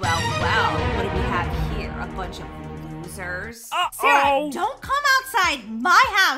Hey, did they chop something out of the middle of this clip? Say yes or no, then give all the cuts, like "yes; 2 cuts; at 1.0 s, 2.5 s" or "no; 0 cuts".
no; 0 cuts